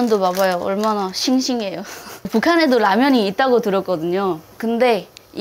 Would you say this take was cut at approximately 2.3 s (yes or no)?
yes